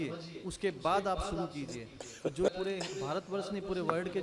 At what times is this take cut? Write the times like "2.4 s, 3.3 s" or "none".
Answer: 2.5 s